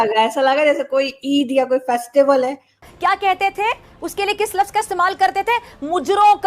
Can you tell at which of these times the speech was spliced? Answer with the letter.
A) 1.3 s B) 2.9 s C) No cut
B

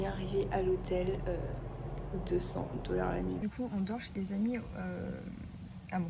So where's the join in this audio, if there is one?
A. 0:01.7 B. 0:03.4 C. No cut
B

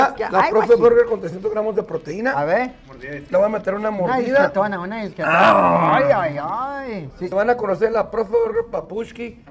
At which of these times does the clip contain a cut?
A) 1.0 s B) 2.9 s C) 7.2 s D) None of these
C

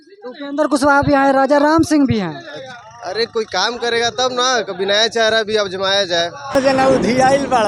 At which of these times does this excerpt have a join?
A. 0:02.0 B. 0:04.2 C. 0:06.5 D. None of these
C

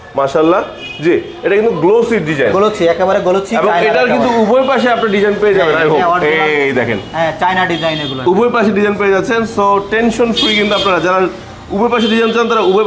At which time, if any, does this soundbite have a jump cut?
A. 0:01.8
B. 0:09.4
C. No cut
C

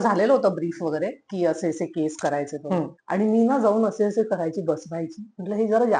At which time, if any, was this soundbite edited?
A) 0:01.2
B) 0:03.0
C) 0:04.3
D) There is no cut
B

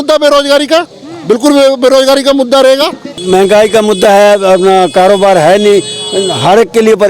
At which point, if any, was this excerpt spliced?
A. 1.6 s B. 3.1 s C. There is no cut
B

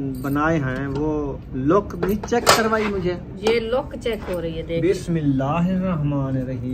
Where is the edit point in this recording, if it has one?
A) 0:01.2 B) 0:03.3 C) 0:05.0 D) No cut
B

